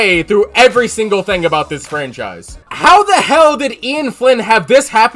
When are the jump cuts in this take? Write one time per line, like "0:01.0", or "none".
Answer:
0:02.7

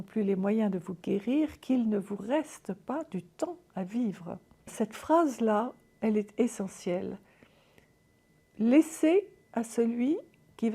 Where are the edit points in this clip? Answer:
0:04.7

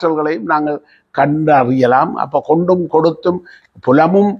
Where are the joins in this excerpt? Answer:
none

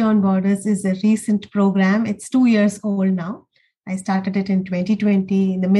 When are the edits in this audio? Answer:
none

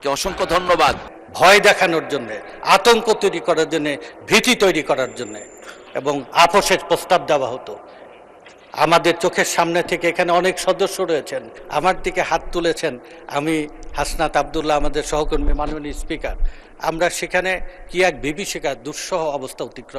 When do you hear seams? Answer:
0:01.1
0:11.6

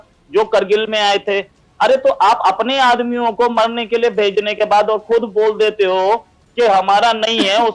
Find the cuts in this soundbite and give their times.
none

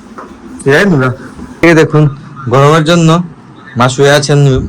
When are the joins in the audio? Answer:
0:01.6

